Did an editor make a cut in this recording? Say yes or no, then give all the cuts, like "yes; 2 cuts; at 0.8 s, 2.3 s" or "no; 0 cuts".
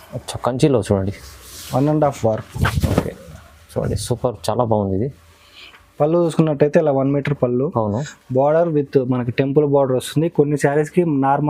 no; 0 cuts